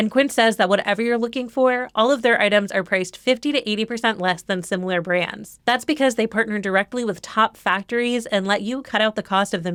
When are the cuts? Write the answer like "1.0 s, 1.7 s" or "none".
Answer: none

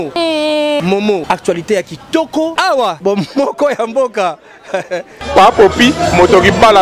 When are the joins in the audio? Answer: 5.2 s

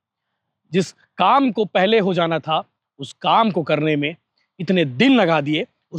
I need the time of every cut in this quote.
none

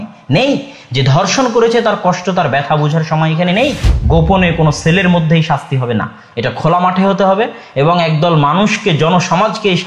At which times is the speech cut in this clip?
3.9 s

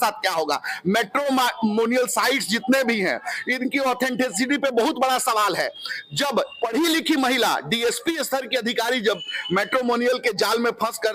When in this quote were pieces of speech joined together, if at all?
none

